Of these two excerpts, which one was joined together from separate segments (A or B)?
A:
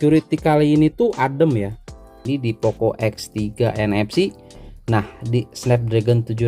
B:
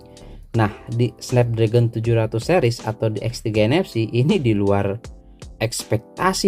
A